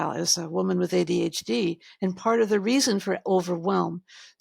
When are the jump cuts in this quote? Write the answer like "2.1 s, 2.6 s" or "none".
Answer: none